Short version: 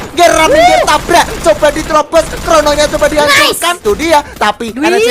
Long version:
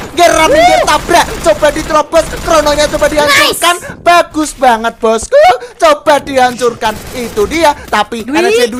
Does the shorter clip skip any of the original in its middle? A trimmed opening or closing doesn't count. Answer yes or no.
yes